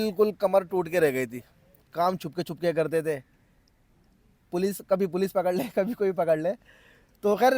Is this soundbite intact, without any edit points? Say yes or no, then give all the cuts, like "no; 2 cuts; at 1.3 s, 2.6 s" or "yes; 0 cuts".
yes; 0 cuts